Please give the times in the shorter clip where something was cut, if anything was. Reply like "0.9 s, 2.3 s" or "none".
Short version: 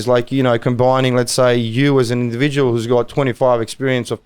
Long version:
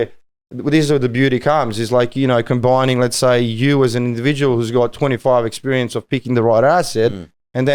none